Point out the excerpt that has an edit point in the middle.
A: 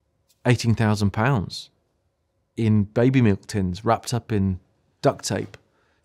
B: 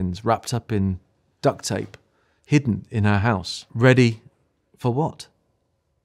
B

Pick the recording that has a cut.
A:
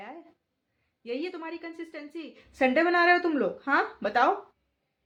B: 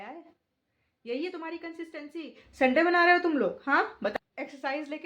B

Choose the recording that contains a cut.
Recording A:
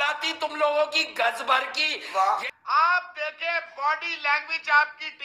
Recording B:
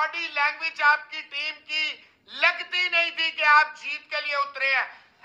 A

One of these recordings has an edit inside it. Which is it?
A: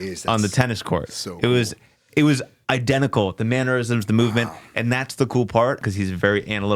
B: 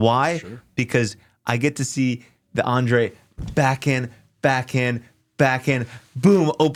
A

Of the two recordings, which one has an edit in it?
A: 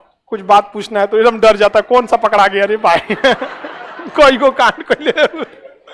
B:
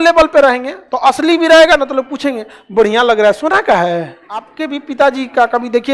B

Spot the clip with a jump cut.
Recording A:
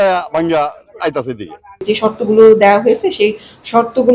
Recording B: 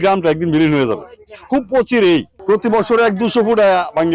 A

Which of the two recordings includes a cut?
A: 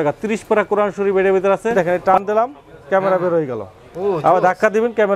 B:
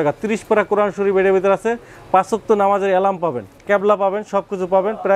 A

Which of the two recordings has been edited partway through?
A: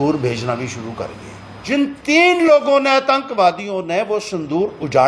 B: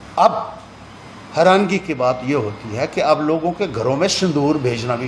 A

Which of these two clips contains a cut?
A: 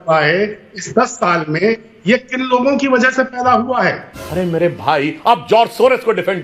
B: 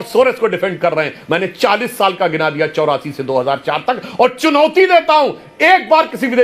A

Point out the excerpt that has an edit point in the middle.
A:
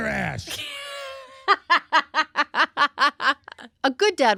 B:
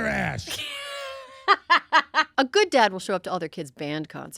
B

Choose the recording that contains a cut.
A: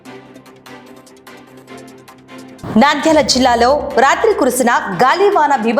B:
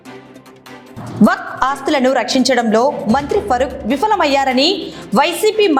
A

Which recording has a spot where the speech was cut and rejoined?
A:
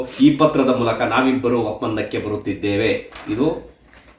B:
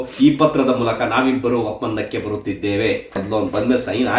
B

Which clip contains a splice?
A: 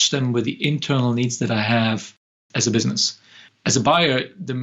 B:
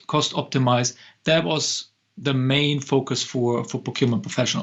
A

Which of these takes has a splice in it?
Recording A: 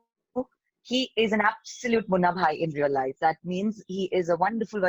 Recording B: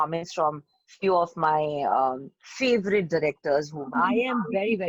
B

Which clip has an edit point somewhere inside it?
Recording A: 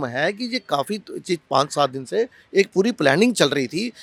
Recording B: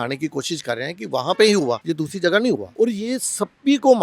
B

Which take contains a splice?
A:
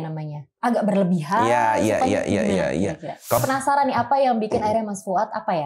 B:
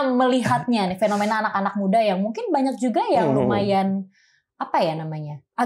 A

